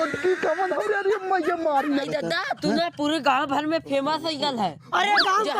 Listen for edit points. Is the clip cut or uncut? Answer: cut